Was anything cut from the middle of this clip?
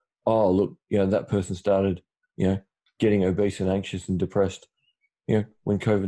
no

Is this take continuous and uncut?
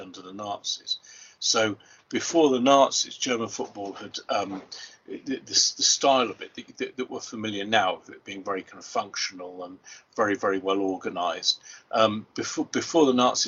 yes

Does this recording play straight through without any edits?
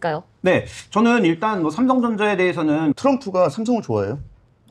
no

